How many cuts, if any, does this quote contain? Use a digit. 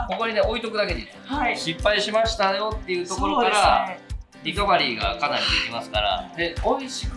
2